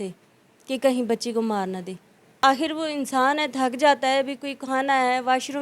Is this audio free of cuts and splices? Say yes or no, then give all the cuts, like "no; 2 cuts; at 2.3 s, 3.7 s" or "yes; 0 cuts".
no; 1 cut; at 2.4 s